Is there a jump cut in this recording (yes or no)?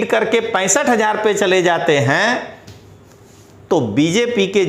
no